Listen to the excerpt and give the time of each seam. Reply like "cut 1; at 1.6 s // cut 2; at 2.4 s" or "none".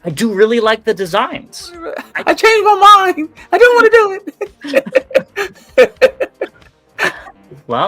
cut 1; at 2.1 s